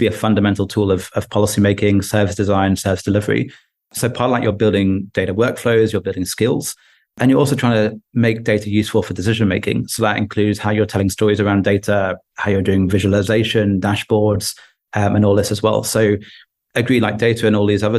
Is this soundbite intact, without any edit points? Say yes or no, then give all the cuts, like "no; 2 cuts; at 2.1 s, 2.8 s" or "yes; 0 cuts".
yes; 0 cuts